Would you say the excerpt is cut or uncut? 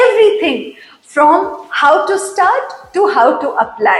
uncut